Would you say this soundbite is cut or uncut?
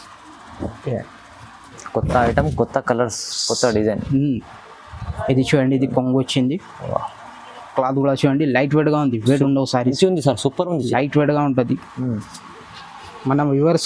cut